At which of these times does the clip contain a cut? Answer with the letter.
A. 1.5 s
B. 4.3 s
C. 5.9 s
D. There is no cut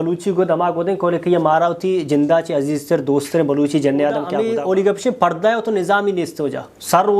B